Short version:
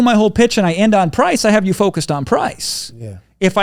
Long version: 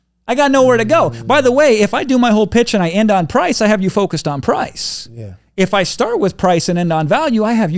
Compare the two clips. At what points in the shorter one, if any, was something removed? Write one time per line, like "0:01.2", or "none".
none